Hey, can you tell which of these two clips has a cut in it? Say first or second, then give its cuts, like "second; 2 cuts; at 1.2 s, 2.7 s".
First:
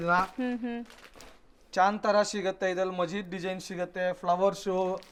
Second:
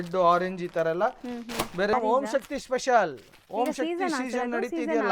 second; 1 cut; at 1.9 s